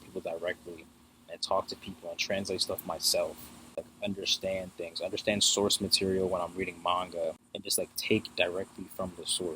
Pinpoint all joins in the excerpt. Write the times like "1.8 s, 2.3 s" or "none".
3.8 s, 7.5 s